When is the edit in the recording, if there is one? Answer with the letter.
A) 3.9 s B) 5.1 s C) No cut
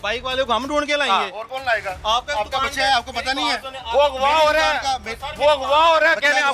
C